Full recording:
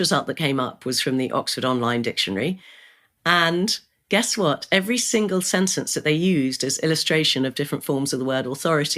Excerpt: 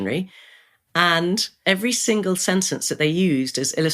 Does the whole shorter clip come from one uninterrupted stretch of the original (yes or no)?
no